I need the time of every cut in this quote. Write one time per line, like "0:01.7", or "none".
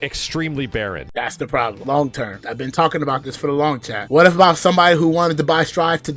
0:01.4
0:02.4
0:04.1